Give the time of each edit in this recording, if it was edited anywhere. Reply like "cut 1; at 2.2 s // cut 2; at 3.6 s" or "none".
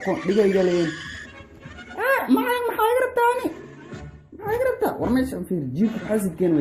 cut 1; at 2.5 s